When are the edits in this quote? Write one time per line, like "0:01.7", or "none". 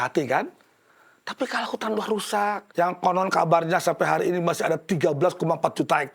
0:02.6